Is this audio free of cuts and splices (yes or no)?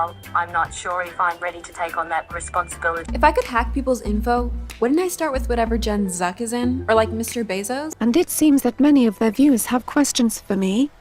no